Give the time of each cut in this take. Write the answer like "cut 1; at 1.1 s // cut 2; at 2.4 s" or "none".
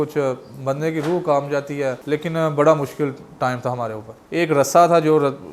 cut 1; at 2.0 s // cut 2; at 4.2 s

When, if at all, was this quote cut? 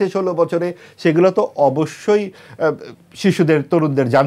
none

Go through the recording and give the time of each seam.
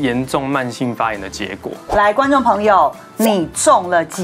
cut 1; at 1.7 s

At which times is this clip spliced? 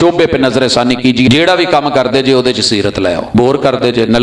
cut 1; at 1.4 s // cut 2; at 3.4 s

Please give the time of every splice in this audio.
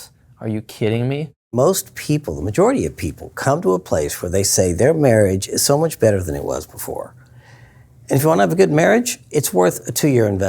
cut 1; at 1.5 s

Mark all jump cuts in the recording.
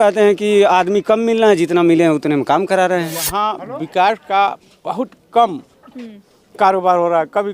cut 1; at 3.2 s

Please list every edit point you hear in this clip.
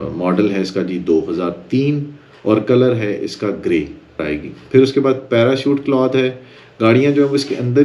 none

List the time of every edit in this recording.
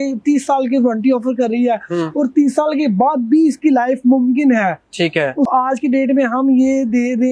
cut 1; at 5.5 s

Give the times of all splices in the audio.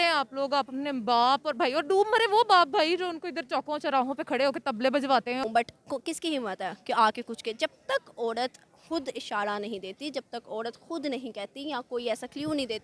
cut 1; at 5.4 s

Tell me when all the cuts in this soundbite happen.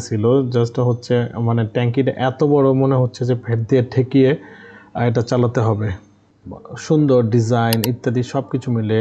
cut 1; at 6.4 s

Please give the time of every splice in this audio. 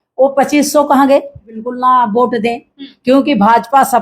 cut 1; at 1.7 s

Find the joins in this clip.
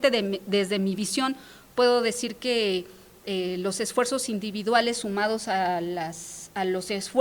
none

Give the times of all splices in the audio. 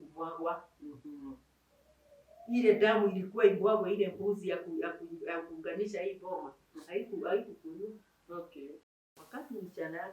cut 1; at 8.9 s

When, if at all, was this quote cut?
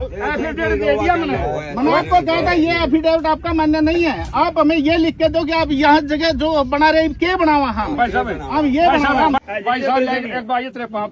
cut 1; at 9.4 s

